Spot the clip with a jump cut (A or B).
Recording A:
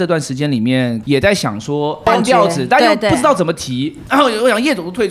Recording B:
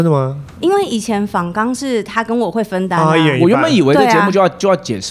A